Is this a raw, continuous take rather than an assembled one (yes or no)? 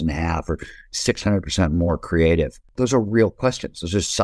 no